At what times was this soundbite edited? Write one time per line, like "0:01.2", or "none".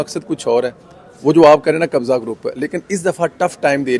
none